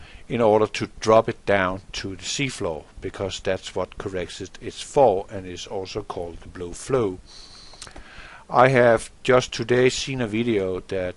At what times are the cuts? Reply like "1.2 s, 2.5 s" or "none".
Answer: none